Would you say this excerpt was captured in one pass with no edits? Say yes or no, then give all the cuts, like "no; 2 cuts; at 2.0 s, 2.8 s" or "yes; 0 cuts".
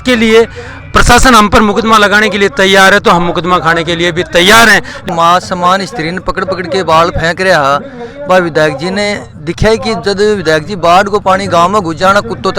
no; 1 cut; at 5.0 s